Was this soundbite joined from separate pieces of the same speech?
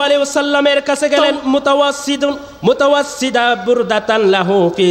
yes; 1 cut; at 1.3 s

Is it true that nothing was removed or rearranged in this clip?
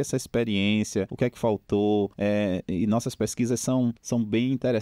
no; 3 cuts; at 1.1 s, 2.1 s, 4.0 s

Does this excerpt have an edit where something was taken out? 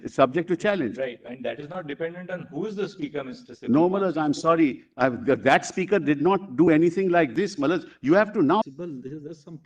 yes; 1 cut; at 8.6 s

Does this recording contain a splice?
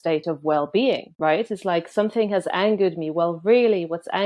yes; 1 cut; at 1.1 s

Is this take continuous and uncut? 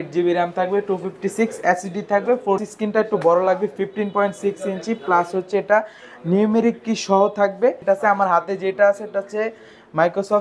no; 2 cuts; at 2.7 s, 7.8 s

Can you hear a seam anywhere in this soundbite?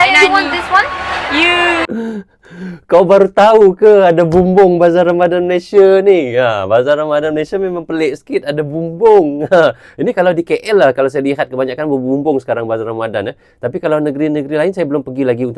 no; 0 cuts

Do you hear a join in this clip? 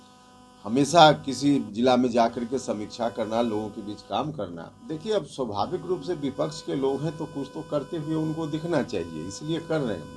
yes; 1 cut; at 4.7 s

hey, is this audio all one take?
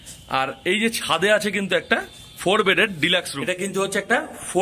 no; 1 cut; at 3.4 s

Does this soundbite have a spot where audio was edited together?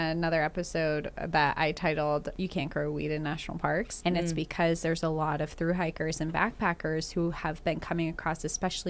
yes; 2 cuts; at 2.3 s, 3.9 s

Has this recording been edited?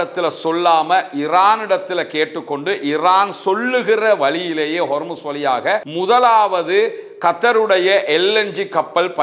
no; 0 cuts

